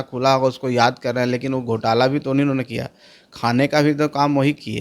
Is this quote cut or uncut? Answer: uncut